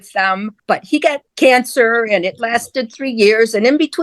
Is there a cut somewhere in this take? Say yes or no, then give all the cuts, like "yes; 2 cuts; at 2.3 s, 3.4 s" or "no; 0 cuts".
yes; 1 cut; at 1.0 s